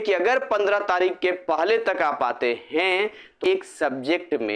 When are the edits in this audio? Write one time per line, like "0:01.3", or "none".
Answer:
0:03.5